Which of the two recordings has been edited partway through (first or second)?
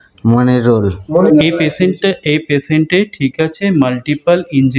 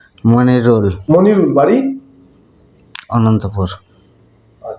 first